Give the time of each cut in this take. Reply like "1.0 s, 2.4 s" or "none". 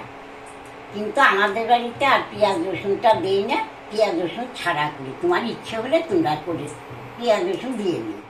none